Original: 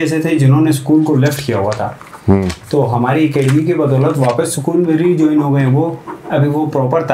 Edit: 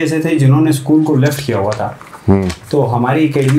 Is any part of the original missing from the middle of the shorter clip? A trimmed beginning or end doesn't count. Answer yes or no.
no